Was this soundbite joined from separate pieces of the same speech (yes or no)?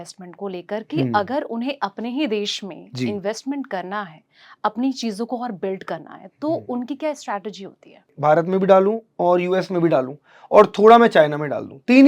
yes